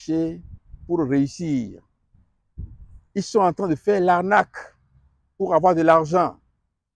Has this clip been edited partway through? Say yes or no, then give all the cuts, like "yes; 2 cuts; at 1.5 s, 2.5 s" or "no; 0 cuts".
no; 0 cuts